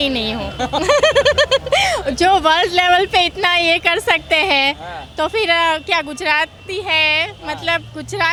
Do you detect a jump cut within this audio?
no; 0 cuts

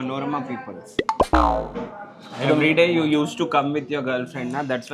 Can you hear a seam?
no; 0 cuts

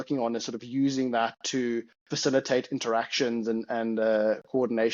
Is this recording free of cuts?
yes; 0 cuts

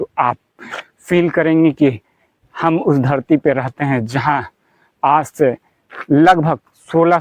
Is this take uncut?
yes; 0 cuts

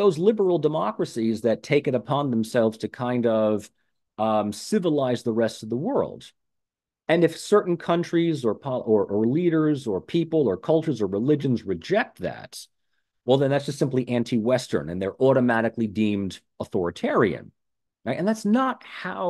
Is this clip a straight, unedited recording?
yes; 0 cuts

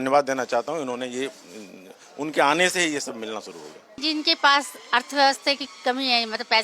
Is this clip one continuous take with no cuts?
no; 1 cut; at 4.0 s

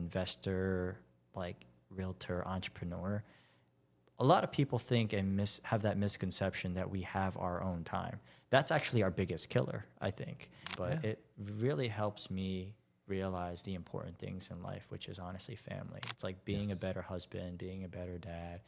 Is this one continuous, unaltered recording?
no; 1 cut; at 10.6 s

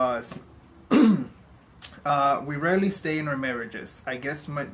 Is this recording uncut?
no; 1 cut; at 2.9 s

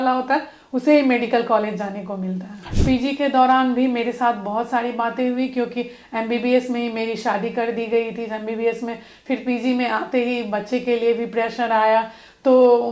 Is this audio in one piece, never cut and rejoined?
no; 1 cut; at 2.7 s

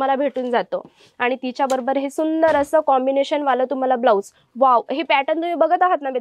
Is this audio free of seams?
yes; 0 cuts

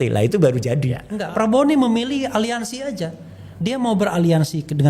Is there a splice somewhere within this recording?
yes; 1 cut; at 1.1 s

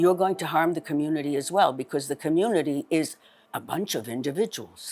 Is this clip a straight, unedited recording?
no; 1 cut; at 3.5 s

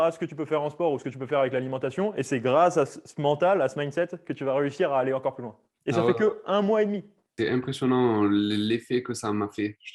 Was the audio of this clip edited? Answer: no; 0 cuts

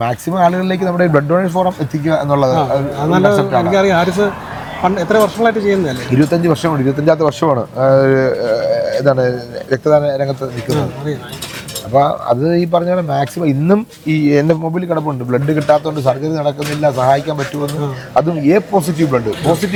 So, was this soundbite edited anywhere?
no; 0 cuts

